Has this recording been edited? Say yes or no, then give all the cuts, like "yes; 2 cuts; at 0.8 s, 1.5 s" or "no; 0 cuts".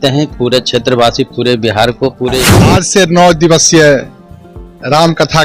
yes; 1 cut; at 2.7 s